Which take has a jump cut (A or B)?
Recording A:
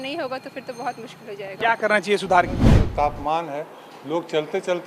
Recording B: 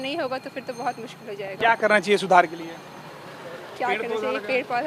A